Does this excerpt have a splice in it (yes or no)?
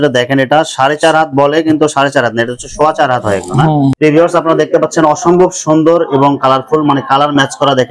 yes